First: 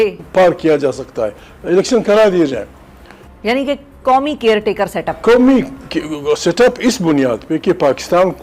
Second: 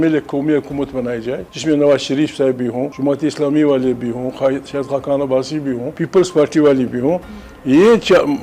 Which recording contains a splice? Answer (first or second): second